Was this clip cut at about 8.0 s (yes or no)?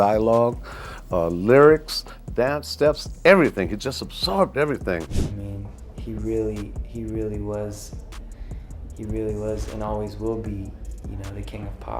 no